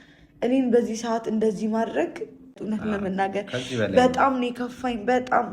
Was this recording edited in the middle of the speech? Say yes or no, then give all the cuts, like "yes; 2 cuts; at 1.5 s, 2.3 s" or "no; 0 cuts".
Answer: yes; 1 cut; at 2.7 s